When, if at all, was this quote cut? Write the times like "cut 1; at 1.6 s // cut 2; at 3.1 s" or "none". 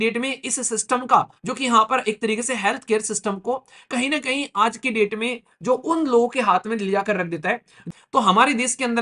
cut 1; at 7.9 s